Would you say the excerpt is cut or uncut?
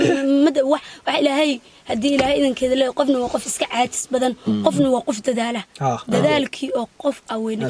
uncut